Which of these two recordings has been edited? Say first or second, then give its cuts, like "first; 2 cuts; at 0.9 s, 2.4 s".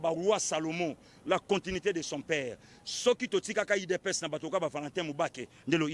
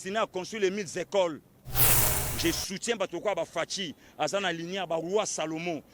second; 1 cut; at 2.0 s